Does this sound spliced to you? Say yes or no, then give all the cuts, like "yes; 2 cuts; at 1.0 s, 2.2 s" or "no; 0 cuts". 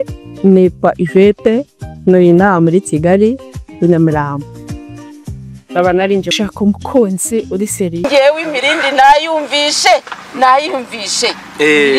yes; 2 cuts; at 6.3 s, 8.0 s